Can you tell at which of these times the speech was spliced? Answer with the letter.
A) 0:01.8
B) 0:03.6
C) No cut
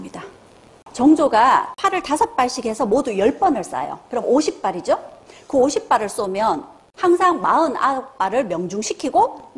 C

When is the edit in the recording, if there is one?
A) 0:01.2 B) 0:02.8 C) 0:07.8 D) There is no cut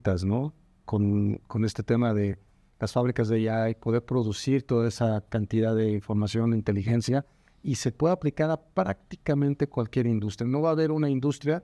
D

